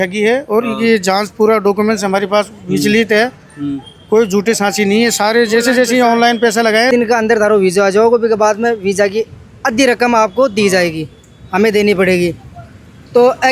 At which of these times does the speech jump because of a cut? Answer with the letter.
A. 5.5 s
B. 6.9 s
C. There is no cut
B